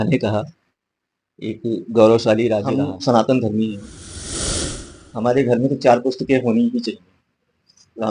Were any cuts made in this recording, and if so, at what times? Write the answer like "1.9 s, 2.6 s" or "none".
2.7 s